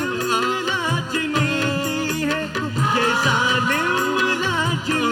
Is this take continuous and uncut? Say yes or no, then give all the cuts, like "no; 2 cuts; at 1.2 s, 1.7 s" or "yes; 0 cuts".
yes; 0 cuts